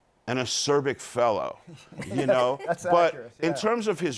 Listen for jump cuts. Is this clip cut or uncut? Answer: uncut